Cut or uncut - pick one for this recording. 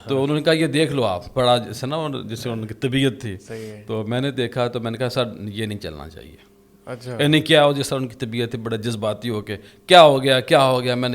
uncut